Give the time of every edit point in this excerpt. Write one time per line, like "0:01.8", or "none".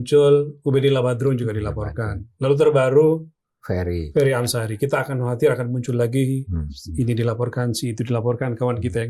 none